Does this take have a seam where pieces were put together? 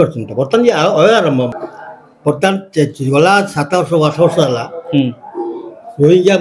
yes; 1 cut; at 1.5 s

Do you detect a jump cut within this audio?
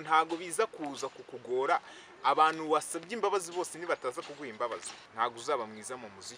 yes; 1 cut; at 5.0 s

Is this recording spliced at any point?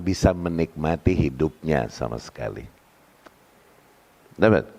no; 0 cuts

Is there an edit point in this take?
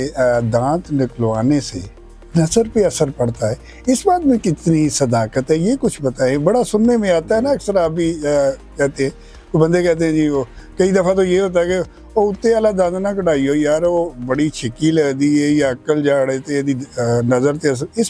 no; 0 cuts

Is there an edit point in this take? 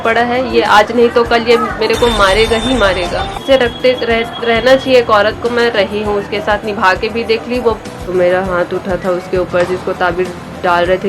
yes; 2 cuts; at 3.4 s, 8.1 s

